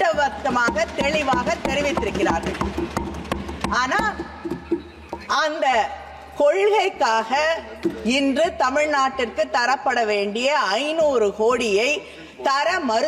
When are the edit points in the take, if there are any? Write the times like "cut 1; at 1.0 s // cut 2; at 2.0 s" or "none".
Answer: none